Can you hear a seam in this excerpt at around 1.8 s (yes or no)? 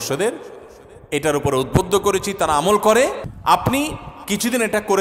no